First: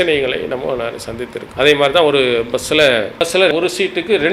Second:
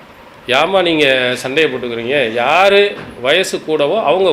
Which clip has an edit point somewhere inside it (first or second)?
first